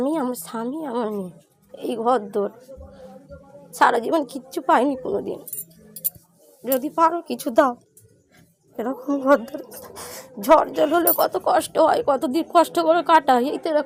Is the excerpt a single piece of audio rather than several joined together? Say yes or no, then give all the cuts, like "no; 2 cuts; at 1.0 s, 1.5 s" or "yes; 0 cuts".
yes; 0 cuts